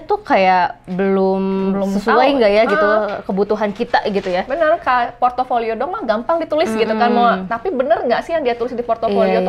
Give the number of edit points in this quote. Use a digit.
0